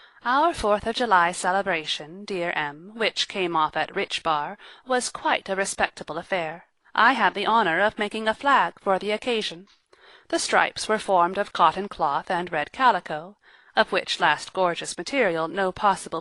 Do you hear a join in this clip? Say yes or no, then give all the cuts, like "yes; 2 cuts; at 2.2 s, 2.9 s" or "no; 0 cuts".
yes; 1 cut; at 14.5 s